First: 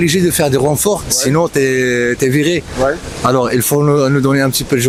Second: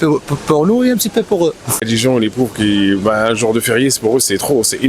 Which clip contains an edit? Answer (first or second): second